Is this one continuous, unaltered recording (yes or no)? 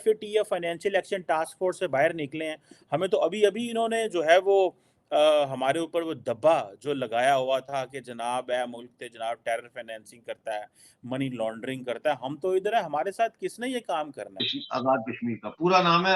no